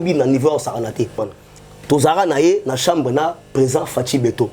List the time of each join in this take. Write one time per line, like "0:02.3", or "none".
0:01.2